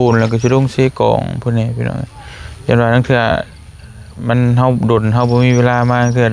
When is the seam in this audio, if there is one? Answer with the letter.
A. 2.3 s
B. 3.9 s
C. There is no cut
C